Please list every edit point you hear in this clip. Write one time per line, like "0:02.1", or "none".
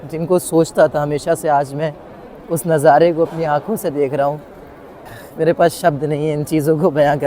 none